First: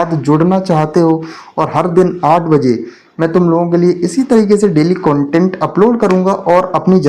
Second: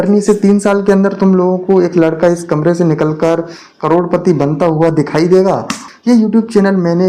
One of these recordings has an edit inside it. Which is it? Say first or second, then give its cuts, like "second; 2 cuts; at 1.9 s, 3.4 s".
second; 1 cut; at 5.9 s